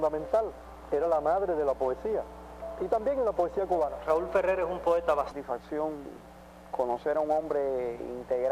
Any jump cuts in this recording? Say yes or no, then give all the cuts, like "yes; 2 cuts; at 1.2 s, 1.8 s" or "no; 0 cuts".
no; 0 cuts